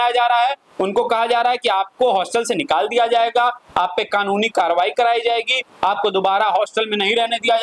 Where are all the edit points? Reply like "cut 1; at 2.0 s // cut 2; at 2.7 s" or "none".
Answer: none

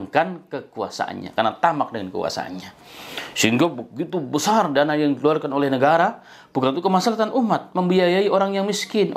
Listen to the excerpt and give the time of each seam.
none

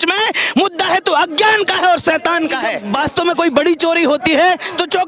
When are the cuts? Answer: cut 1; at 2.8 s

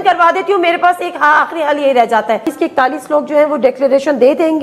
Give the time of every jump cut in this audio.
cut 1; at 2.5 s

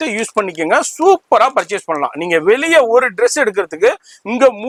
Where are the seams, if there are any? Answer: none

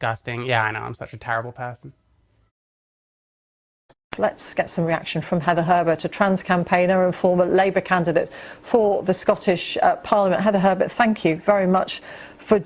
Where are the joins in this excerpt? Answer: none

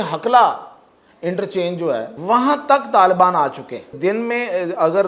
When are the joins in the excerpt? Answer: cut 1; at 2.1 s // cut 2; at 3.9 s

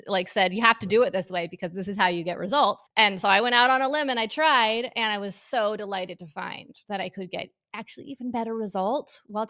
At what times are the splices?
cut 1; at 2.8 s

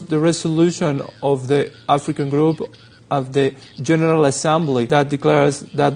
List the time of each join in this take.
cut 1; at 4.9 s

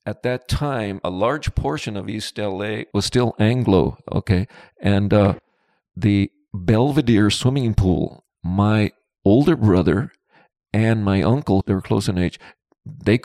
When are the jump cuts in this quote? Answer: cut 1; at 11.6 s

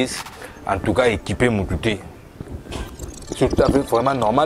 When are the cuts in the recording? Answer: cut 1; at 2.4 s

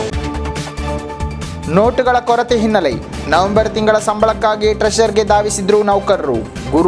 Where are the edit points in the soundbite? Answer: cut 1; at 1.2 s

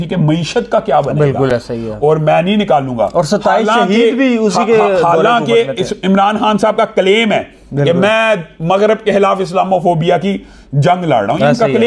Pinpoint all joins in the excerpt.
none

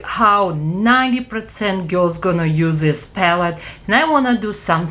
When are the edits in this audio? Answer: none

